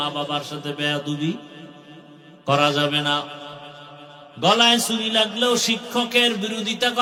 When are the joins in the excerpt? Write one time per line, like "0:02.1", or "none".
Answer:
none